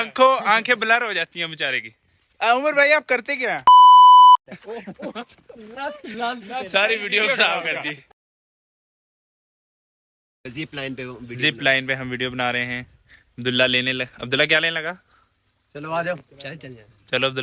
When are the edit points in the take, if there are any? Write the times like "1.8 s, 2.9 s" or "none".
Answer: none